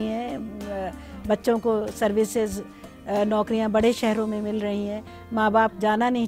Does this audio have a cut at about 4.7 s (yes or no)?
no